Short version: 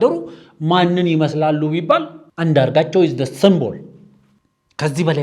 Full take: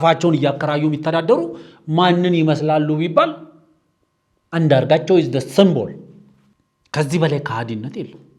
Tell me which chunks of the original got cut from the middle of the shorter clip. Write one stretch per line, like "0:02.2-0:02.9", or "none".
0:03.5-0:04.4